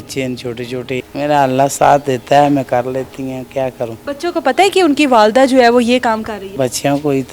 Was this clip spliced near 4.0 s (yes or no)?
yes